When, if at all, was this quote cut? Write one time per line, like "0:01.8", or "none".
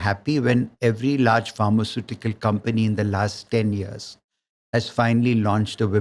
none